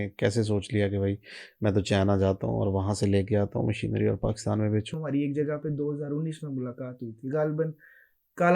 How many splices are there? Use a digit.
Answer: 1